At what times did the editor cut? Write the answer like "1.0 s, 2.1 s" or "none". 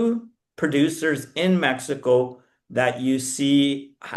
none